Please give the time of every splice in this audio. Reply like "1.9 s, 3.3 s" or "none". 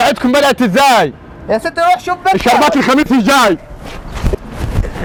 none